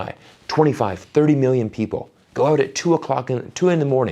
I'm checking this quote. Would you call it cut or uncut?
uncut